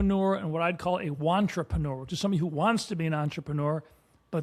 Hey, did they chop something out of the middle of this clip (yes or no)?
no